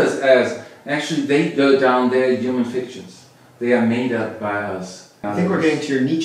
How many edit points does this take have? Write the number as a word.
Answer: one